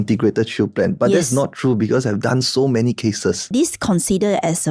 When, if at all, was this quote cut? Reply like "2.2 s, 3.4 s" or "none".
3.5 s